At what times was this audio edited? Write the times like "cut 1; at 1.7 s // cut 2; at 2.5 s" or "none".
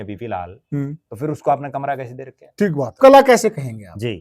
cut 1; at 2.9 s